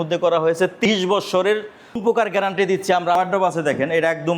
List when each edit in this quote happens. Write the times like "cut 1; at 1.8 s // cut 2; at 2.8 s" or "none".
cut 1; at 0.9 s // cut 2; at 2.0 s // cut 3; at 3.2 s